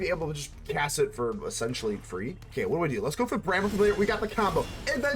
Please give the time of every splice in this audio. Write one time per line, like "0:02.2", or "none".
0:02.4